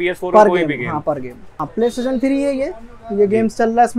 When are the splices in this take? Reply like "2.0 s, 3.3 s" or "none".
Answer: 1.6 s